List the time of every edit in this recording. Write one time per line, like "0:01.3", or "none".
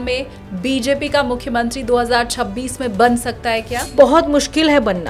0:03.9